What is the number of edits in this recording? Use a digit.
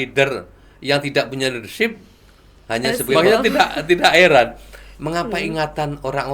1